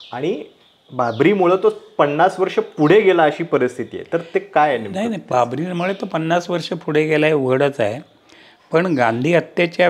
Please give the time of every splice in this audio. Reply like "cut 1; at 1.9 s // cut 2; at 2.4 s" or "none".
none

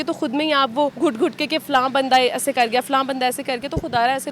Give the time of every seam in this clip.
cut 1; at 0.9 s

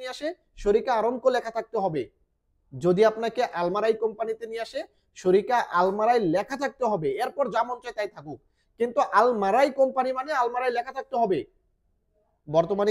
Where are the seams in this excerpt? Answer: none

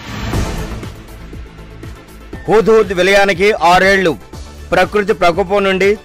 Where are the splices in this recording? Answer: cut 1; at 2.1 s

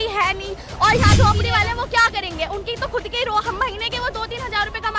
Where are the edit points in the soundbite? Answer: cut 1; at 1.1 s

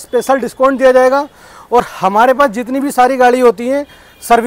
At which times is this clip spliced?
none

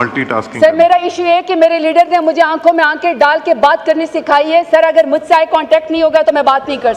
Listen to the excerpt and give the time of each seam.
none

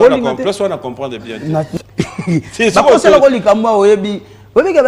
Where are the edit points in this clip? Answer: cut 1; at 1.7 s

